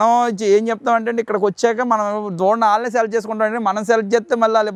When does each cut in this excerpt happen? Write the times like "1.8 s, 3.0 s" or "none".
none